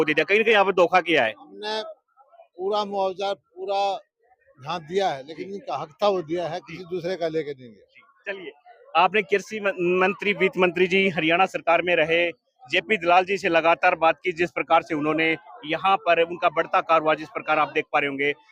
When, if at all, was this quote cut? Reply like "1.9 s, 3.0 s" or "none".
none